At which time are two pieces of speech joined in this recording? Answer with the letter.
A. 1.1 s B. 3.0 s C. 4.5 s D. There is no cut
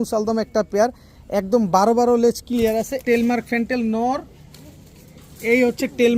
B